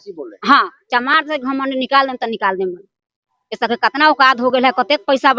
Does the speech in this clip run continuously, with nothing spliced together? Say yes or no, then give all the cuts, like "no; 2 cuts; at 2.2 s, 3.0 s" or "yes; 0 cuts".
yes; 0 cuts